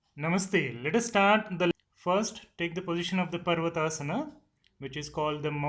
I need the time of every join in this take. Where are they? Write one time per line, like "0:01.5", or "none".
0:01.7